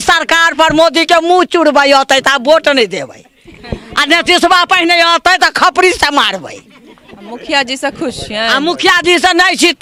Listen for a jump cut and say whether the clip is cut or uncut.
uncut